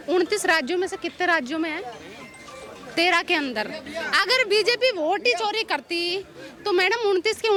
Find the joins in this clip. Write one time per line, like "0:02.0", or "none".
none